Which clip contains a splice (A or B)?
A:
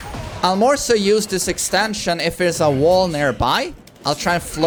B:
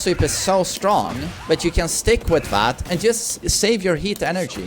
B